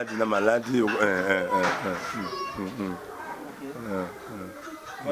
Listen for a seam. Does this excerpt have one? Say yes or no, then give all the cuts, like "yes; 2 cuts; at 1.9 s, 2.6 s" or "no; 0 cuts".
no; 0 cuts